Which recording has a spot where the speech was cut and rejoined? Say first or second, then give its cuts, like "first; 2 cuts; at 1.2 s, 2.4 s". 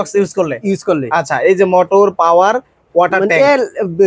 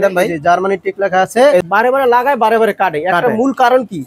second; 1 cut; at 1.6 s